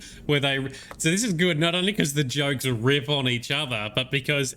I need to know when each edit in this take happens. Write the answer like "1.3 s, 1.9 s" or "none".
none